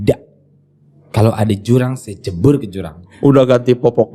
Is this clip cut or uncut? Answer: cut